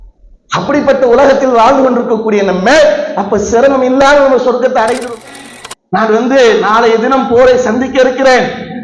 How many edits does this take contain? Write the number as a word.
one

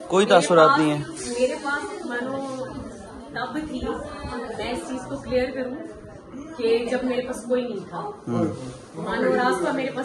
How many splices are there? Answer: zero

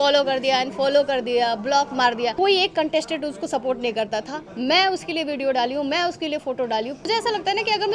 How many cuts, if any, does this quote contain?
two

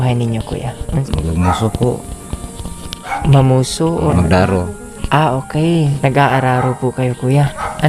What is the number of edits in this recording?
three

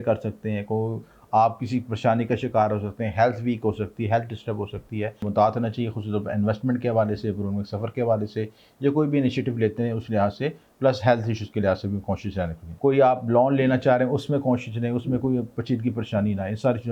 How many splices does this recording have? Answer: two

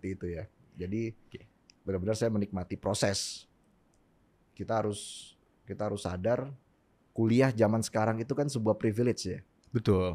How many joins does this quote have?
zero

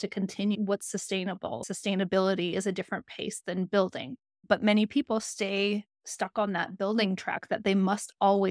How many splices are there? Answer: one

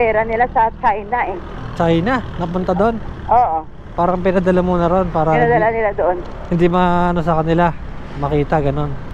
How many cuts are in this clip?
zero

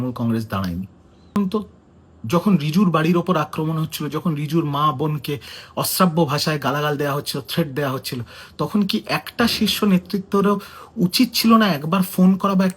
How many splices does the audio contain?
one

